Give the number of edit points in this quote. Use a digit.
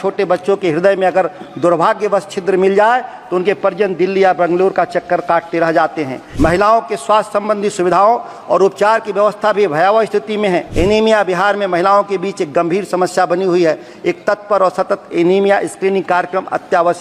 2